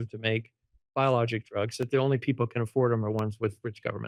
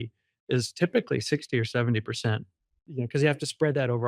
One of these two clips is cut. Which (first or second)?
second